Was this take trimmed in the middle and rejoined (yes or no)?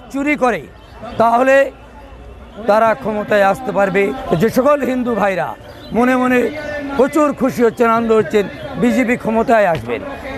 yes